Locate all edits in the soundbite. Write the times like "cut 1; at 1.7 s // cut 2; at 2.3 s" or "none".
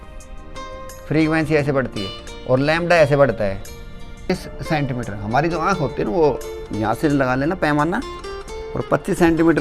cut 1; at 4.3 s